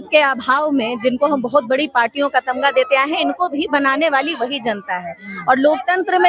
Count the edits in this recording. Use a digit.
0